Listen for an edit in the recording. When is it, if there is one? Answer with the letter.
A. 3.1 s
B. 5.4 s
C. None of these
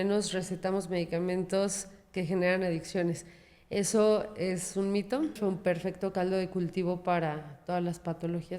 B